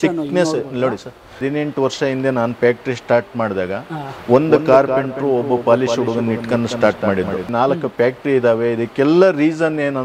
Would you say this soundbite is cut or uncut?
cut